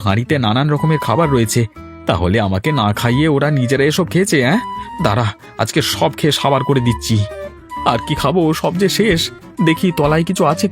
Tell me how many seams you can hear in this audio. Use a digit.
1